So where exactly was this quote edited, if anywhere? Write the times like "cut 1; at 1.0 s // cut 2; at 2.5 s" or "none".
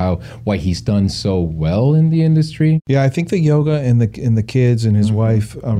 cut 1; at 2.8 s